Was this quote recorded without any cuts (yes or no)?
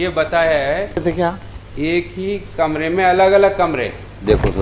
no